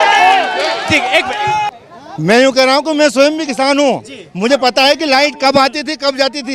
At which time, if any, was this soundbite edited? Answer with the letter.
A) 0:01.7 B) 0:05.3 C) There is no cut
A